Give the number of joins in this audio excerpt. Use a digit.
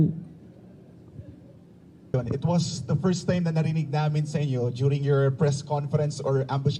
1